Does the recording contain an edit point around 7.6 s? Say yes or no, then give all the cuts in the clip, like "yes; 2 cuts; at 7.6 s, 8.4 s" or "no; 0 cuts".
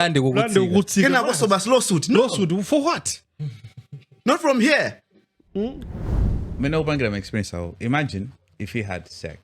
no; 1 cut; at 6.4 s